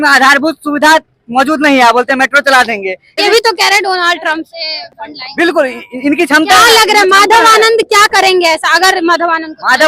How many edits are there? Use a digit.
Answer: 1